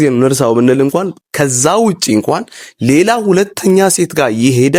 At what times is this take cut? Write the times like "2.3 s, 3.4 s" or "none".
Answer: none